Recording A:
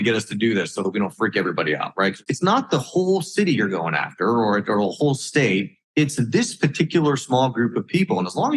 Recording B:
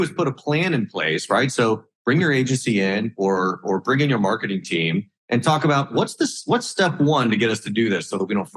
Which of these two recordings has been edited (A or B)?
A